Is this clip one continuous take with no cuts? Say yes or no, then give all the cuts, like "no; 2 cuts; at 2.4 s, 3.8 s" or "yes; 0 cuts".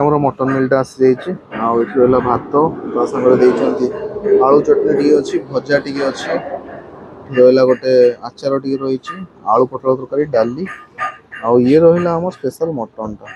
yes; 0 cuts